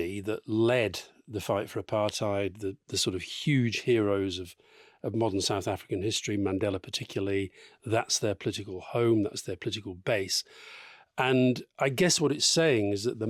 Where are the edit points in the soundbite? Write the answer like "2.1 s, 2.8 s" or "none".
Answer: none